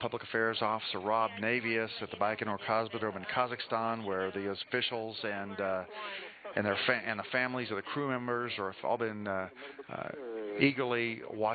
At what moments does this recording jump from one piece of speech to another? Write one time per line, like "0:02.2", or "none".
0:02.6